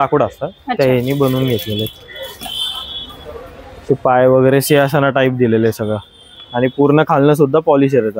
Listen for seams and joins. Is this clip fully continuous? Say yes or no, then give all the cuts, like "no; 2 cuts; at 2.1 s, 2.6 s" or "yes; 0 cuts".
yes; 0 cuts